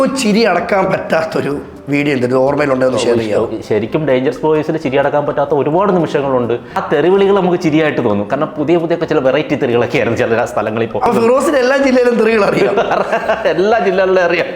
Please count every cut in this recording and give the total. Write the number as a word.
two